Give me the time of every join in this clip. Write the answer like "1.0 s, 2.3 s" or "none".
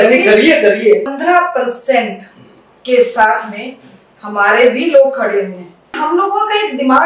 1.1 s, 6.0 s